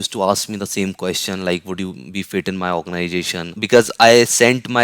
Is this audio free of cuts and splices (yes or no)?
no